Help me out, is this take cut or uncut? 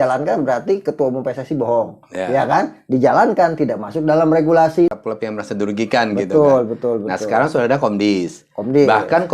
cut